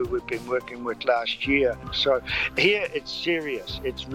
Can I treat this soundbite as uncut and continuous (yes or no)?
no